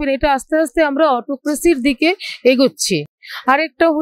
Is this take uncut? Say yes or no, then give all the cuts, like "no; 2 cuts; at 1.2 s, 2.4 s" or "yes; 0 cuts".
yes; 0 cuts